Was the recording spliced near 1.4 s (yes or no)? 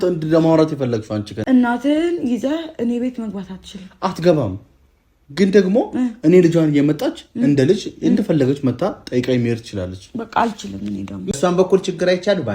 yes